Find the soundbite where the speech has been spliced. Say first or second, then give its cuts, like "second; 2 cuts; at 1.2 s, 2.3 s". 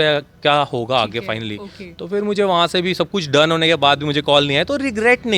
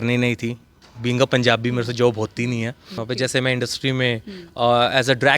second; 1 cut; at 2.9 s